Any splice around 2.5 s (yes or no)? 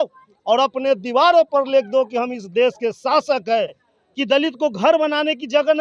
no